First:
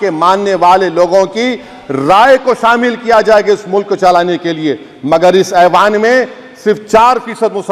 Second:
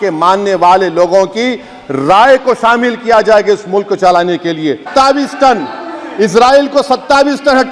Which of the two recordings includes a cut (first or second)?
second